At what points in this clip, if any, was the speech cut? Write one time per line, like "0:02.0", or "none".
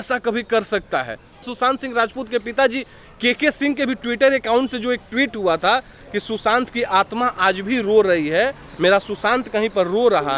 0:01.5